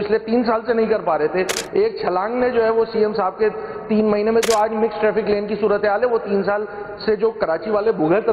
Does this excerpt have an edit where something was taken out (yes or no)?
no